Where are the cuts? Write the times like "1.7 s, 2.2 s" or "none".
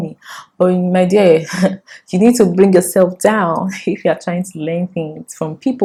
none